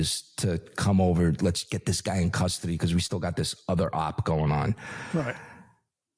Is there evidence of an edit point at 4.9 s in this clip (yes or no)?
no